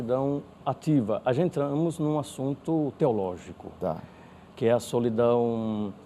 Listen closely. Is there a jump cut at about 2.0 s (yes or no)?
no